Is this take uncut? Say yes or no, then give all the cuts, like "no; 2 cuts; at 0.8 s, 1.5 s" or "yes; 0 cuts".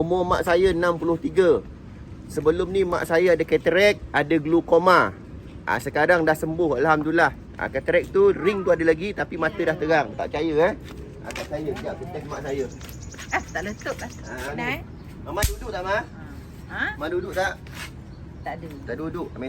no; 1 cut; at 14.5 s